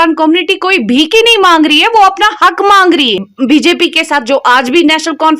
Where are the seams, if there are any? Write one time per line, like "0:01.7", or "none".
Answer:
0:03.3

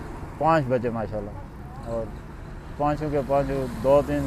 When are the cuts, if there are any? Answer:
none

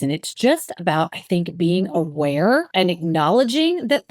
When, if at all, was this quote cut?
0:02.7

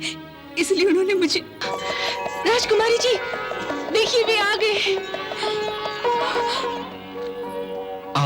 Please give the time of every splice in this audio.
0:01.6
0:06.8

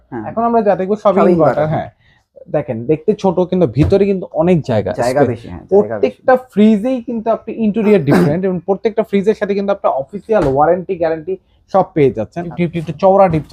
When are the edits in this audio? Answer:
0:12.5

